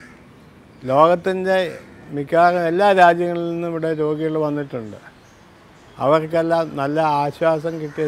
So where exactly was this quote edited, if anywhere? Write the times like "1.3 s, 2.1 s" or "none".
none

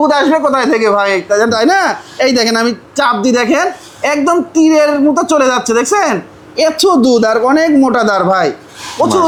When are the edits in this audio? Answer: none

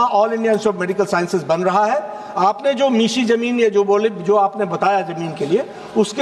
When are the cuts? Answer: none

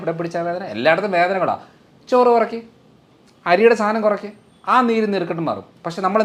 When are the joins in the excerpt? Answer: none

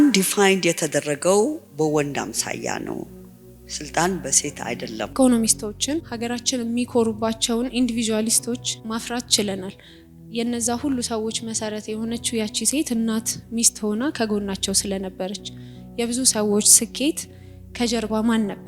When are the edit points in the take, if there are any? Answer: 1.6 s, 5.1 s, 6.1 s, 8.7 s

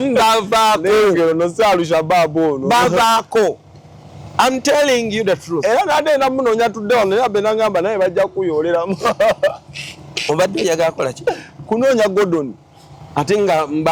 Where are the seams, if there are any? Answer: none

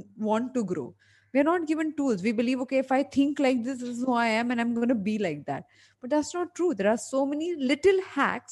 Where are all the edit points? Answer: none

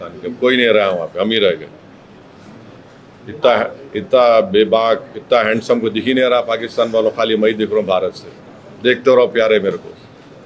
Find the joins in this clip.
none

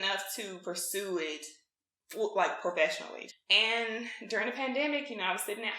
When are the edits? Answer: 3.1 s

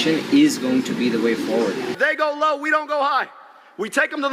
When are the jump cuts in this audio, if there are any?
1.9 s

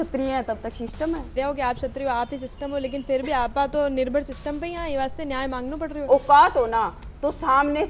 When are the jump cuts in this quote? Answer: 1.3 s, 6.1 s

